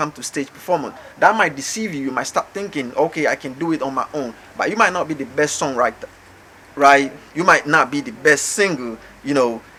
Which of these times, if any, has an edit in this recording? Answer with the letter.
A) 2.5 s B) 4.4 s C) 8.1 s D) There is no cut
D